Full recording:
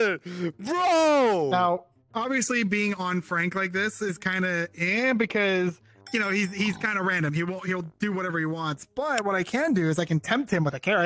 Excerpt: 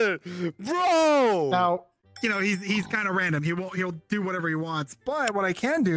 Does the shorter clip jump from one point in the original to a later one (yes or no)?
yes